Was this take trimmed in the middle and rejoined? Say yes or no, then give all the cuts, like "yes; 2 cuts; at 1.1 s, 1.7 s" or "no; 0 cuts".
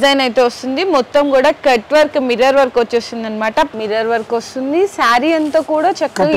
yes; 1 cut; at 3.7 s